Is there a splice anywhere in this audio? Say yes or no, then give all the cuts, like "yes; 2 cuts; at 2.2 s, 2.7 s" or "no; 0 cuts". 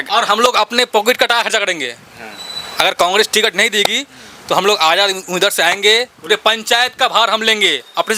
no; 0 cuts